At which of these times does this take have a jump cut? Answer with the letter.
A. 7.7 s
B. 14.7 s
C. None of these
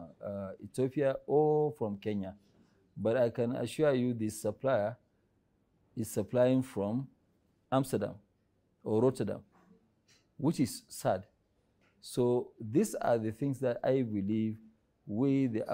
C